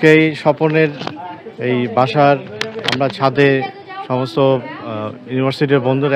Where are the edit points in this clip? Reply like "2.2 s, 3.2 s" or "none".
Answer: none